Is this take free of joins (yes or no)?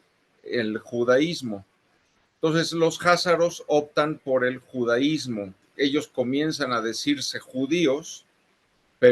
no